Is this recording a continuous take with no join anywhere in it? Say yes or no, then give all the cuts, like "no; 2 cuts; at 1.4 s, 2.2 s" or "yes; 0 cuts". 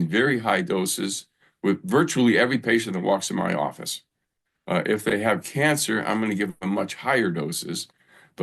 yes; 0 cuts